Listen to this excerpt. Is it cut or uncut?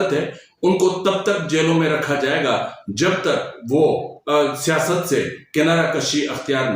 uncut